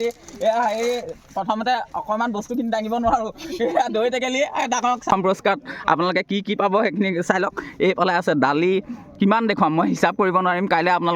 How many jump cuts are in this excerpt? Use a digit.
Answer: 1